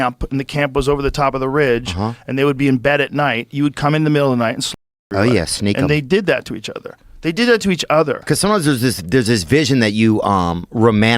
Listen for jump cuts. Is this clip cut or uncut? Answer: cut